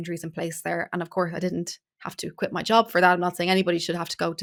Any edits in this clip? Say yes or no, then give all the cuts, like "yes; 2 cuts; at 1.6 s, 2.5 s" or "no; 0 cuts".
no; 0 cuts